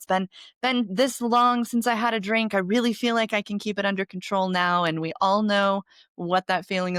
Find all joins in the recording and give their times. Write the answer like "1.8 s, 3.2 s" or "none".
none